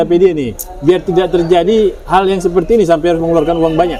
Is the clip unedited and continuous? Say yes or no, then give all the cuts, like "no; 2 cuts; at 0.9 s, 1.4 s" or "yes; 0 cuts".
yes; 0 cuts